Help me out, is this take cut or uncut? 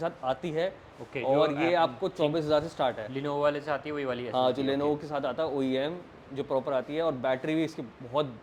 uncut